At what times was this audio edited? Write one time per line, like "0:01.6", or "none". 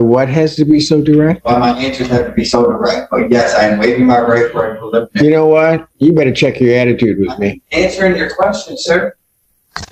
none